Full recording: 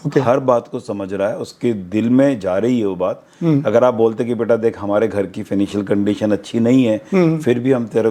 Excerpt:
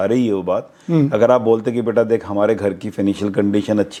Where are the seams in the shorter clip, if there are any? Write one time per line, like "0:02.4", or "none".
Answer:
none

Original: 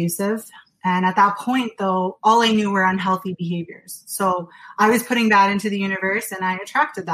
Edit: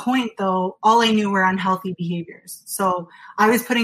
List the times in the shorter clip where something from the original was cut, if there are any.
none

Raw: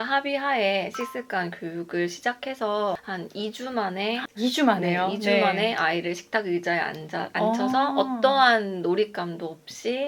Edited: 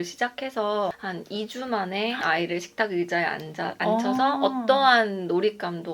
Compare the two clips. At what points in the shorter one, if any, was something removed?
0:02.2

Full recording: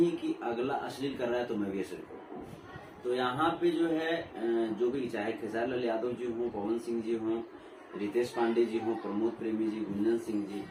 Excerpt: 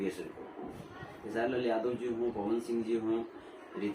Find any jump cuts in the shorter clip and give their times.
0:01.2

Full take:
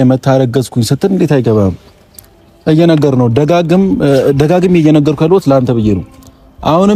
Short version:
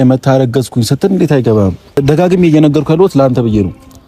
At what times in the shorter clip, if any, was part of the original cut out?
0:02.0

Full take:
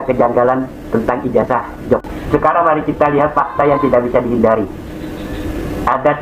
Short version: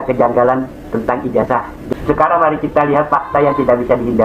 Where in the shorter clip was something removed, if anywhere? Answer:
0:01.8

